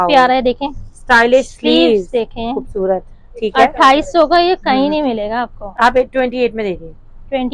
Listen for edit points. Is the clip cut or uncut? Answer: uncut